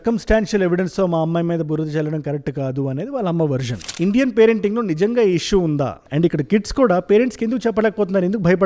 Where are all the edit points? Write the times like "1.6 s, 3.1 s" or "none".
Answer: 3.8 s